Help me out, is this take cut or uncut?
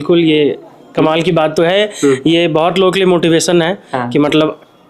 uncut